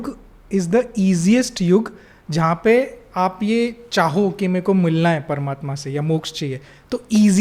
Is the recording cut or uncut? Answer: uncut